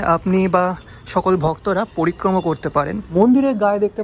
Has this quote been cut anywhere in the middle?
yes; 1 cut; at 3.0 s

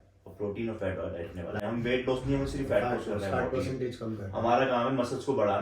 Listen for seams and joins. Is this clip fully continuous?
no; 1 cut; at 1.6 s

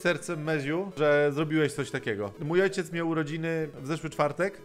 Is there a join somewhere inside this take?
yes; 3 cuts; at 0.9 s, 2.3 s, 3.7 s

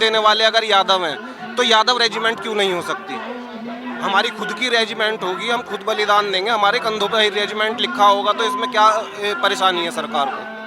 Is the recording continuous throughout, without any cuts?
yes; 0 cuts

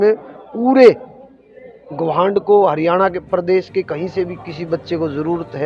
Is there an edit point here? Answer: no; 0 cuts

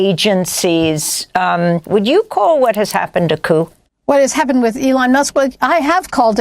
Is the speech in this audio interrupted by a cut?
yes; 2 cuts; at 1.8 s, 3.9 s

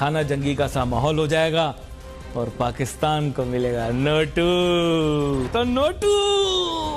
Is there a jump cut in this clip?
yes; 1 cut; at 5.5 s

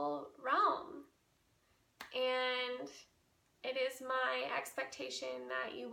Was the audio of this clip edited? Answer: no; 0 cuts

